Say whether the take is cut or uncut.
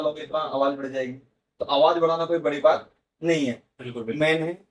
uncut